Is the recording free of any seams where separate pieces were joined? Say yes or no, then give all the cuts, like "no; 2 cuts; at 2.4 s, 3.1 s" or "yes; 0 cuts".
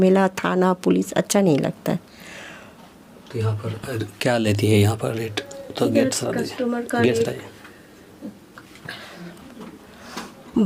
yes; 0 cuts